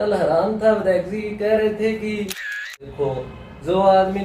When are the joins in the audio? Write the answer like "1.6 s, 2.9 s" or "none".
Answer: 2.7 s